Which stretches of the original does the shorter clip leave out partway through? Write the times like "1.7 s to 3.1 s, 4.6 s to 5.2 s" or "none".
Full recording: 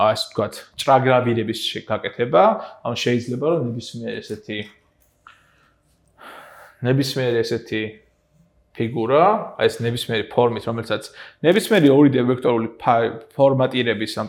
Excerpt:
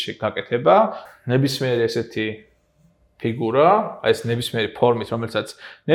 2.7 s to 6.6 s